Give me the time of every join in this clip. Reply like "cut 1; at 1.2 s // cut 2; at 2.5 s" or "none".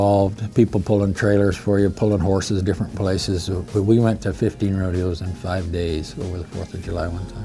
none